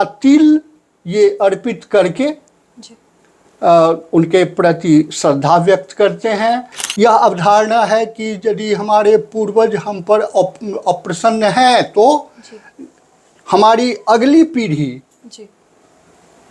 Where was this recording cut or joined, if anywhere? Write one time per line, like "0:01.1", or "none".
0:06.8